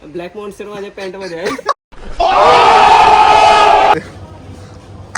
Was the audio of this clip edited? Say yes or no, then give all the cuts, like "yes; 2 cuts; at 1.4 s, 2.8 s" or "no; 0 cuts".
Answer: yes; 1 cut; at 4.0 s